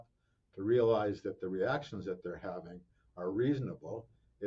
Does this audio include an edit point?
no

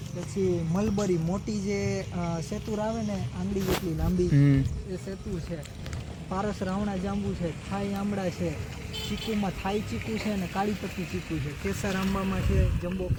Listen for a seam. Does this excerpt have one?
no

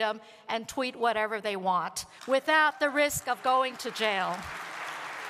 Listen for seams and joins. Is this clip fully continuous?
yes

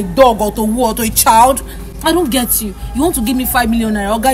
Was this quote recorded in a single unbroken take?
yes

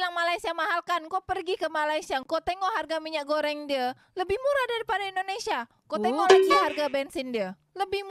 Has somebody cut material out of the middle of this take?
no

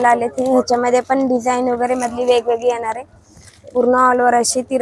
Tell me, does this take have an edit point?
no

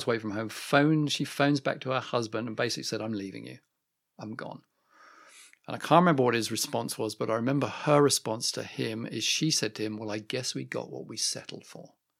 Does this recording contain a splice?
no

